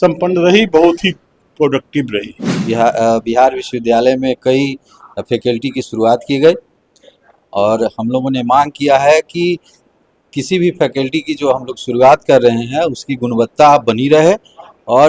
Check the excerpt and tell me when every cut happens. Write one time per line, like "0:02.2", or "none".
0:02.5